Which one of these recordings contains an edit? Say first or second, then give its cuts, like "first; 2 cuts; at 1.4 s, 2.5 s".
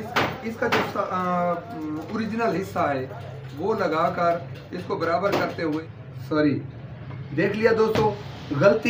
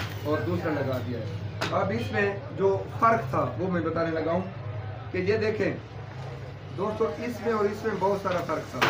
first; 1 cut; at 5.7 s